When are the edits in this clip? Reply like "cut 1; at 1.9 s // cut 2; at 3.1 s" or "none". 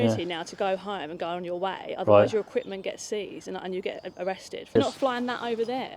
cut 1; at 4.8 s